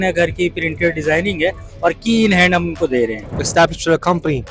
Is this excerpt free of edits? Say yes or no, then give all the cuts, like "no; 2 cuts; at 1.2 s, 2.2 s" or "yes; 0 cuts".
no; 1 cut; at 3.4 s